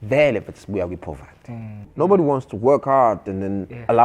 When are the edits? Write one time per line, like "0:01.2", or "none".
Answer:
0:01.9